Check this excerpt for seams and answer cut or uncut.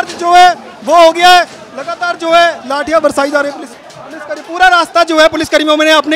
uncut